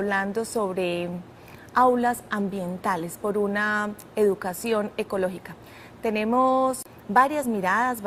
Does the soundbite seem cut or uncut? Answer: uncut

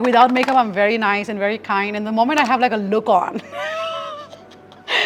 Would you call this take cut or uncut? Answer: uncut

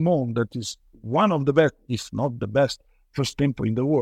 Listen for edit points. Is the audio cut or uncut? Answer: uncut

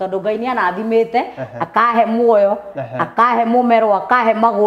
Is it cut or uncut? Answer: uncut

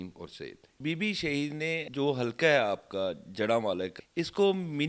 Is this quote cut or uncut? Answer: cut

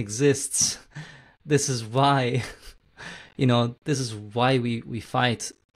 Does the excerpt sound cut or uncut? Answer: uncut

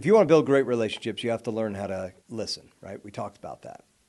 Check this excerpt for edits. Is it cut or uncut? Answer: uncut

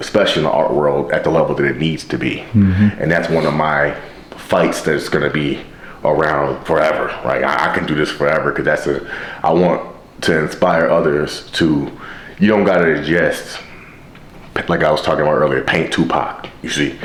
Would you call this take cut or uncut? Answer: uncut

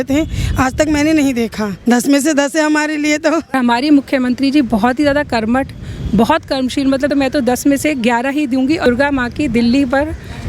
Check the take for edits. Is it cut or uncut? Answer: cut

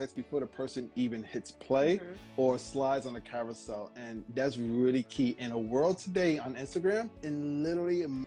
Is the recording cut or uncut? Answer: uncut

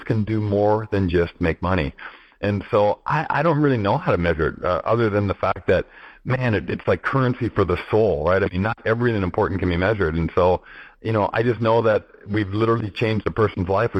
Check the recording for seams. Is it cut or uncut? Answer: uncut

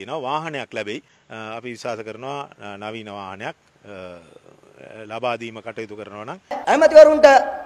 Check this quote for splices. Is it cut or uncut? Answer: cut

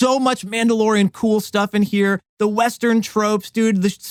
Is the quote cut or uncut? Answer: uncut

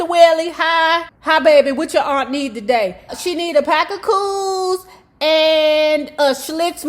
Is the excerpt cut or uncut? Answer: cut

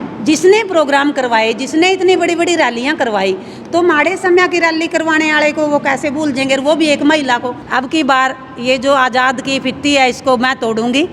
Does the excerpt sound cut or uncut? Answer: cut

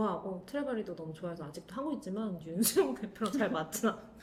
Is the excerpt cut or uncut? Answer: uncut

